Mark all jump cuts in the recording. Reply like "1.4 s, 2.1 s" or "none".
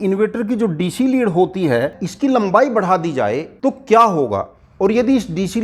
2.0 s, 3.5 s, 4.6 s

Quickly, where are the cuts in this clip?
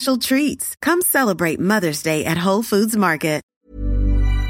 3.5 s

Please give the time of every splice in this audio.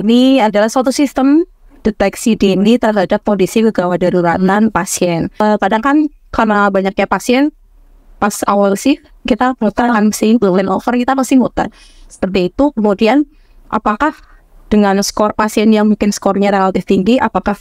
5.4 s

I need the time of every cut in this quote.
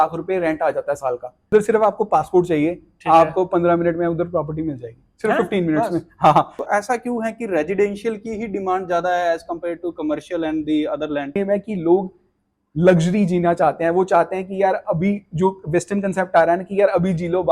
1.5 s, 6.6 s, 11.4 s

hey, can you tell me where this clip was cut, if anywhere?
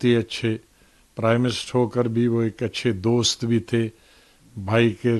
none

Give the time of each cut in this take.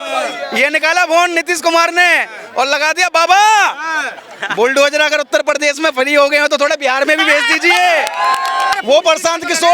8.8 s

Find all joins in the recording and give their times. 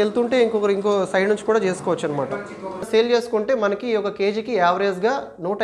2.9 s

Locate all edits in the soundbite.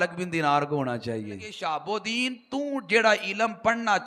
1.5 s

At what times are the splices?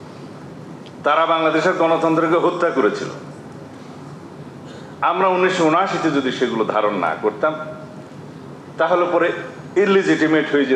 3.8 s

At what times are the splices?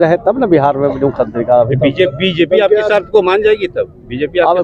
none

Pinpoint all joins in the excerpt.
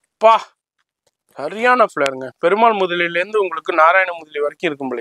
none

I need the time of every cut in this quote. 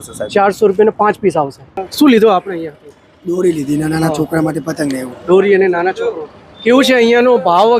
1.8 s

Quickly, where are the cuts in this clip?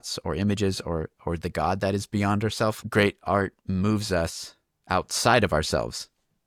none

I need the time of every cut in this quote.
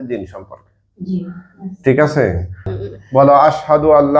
2.7 s

